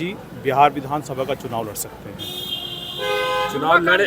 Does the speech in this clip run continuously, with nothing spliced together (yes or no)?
yes